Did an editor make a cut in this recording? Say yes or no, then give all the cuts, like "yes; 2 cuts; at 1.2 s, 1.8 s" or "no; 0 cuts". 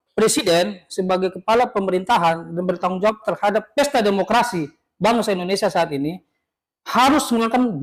no; 0 cuts